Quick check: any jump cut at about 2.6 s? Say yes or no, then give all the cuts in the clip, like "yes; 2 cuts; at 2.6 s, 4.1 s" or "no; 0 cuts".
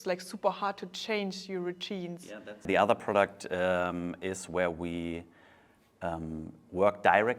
yes; 1 cut; at 2.6 s